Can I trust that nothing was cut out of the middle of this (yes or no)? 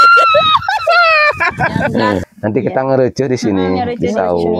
no